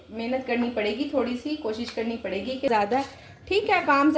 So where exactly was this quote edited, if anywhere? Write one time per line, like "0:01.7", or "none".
0:02.7